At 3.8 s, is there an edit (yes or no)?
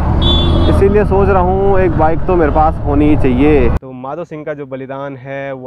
yes